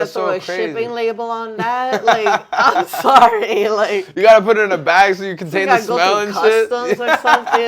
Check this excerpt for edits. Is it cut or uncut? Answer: uncut